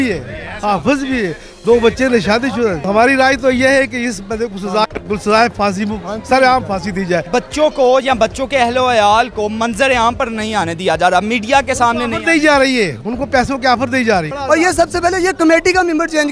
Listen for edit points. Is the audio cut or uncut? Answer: cut